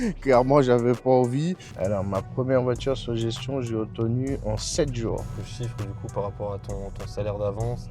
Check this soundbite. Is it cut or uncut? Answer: cut